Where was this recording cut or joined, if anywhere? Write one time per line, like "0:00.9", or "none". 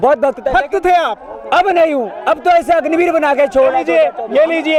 none